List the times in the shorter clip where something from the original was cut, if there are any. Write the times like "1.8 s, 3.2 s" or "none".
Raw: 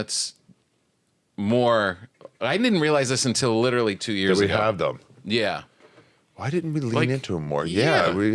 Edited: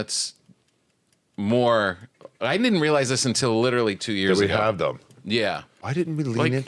5.7 s

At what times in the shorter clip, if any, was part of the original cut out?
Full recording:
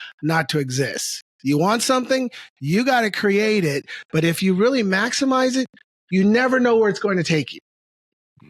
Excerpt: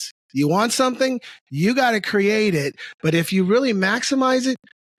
none

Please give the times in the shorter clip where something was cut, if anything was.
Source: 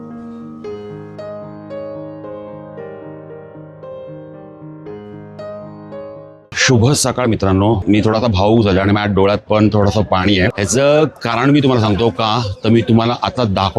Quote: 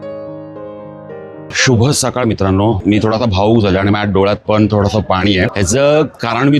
1.5 s

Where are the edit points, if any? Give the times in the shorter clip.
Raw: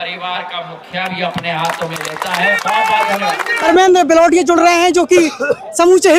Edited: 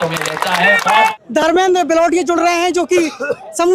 1.1 s

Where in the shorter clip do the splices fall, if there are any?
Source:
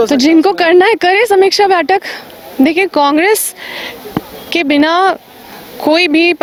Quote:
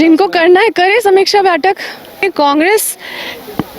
2.2 s

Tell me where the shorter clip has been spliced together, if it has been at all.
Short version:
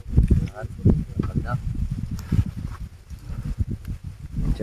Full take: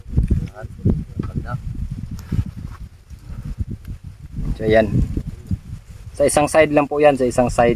none

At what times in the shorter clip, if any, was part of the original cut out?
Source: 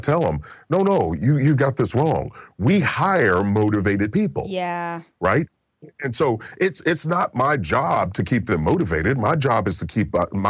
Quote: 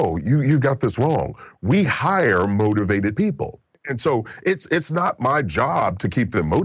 3.5 s

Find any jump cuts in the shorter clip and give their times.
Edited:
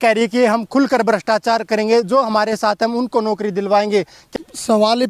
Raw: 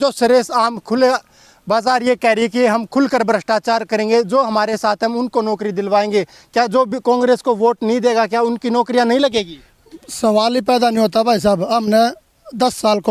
4.2 s

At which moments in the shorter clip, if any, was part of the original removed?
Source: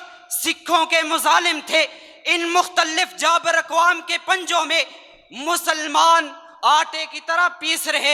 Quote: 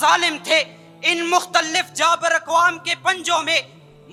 none

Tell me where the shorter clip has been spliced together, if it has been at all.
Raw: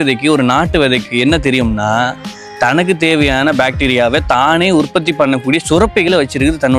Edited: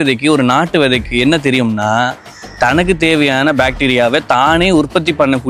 none

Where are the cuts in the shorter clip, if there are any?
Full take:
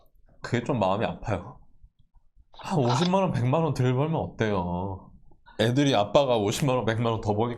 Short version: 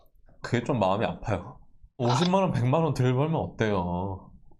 2.0 s

